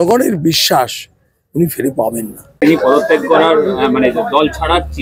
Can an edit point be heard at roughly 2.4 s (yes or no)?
no